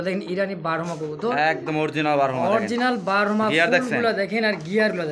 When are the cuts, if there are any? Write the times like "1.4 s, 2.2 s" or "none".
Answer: none